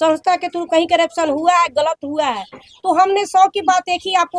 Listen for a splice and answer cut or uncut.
uncut